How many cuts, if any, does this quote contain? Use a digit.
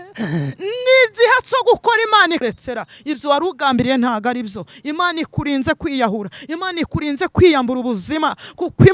1